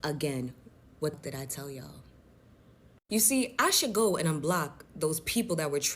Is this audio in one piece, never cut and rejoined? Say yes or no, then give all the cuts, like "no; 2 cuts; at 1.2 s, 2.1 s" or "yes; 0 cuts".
no; 1 cut; at 1.2 s